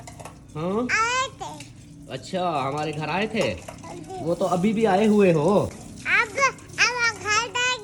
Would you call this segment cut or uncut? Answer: uncut